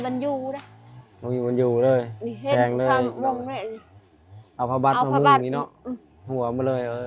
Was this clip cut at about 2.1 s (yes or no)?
no